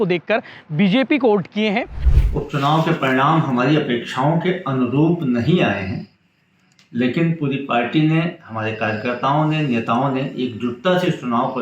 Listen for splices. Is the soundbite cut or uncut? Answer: cut